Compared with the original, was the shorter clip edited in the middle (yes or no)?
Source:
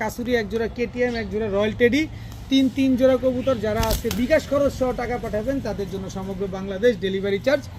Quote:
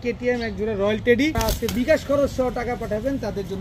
yes